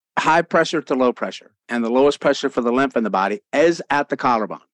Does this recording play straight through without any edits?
no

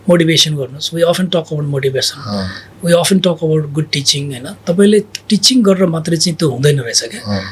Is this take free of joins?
yes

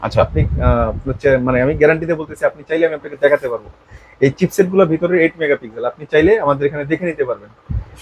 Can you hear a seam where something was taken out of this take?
no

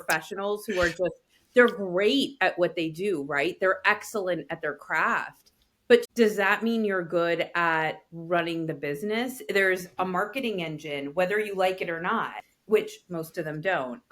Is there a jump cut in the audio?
yes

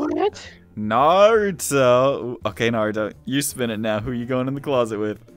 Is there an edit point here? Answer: no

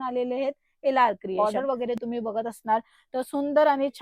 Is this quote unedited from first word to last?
no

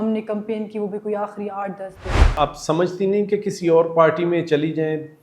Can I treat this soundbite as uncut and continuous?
no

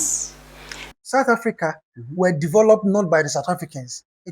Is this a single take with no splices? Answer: no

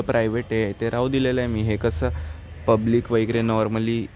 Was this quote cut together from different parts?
no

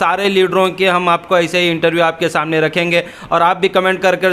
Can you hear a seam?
no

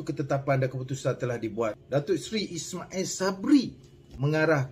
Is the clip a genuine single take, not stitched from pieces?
no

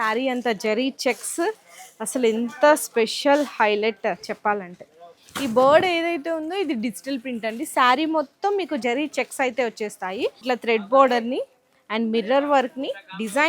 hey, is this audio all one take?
no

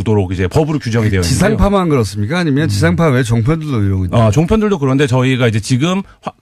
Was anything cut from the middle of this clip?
no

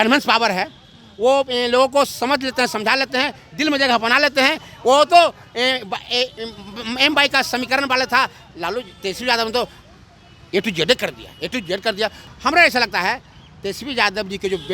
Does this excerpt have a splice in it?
yes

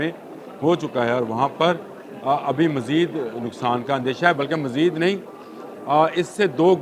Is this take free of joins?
yes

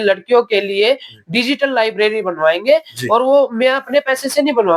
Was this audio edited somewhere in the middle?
no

